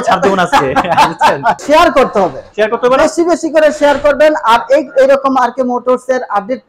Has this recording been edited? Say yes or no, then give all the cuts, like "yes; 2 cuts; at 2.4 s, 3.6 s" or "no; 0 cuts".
yes; 1 cut; at 1.6 s